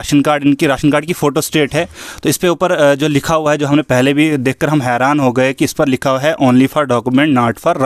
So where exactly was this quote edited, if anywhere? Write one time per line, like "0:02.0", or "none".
none